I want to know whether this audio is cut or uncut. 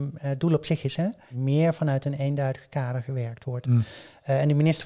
cut